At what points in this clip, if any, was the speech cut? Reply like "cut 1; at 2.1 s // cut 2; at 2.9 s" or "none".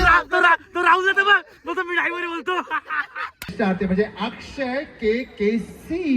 cut 1; at 3.4 s